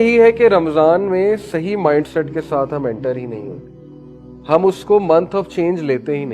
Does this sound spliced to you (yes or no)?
no